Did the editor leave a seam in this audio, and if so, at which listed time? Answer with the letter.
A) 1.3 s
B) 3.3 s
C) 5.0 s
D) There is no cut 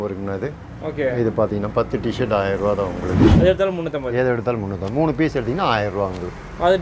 B